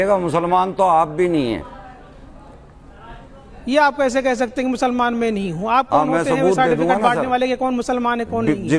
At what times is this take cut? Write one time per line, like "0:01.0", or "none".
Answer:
none